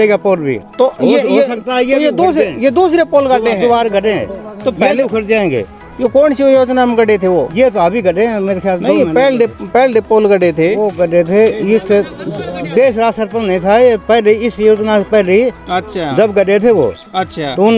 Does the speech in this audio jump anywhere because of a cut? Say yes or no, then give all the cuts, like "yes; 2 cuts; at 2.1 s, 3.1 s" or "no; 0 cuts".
no; 0 cuts